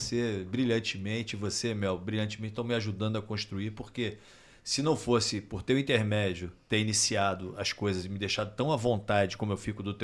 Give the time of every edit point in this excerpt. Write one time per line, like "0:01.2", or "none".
none